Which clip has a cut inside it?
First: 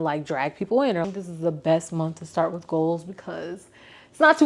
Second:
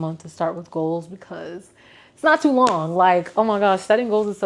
first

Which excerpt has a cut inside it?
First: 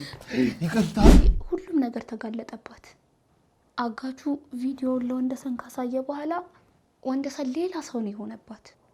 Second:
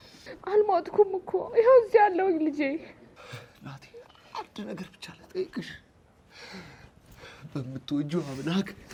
first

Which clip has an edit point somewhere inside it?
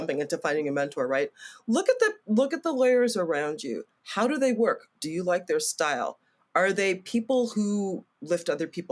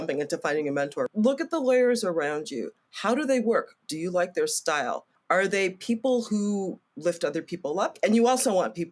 second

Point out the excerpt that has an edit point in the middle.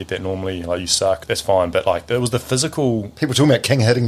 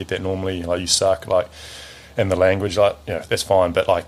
first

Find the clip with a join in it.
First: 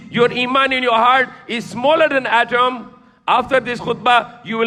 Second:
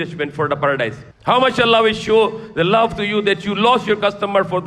second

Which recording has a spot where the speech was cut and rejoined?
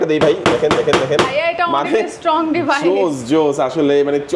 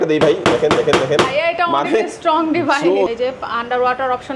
second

